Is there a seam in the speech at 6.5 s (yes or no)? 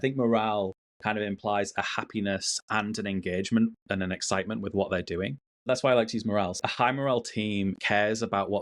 yes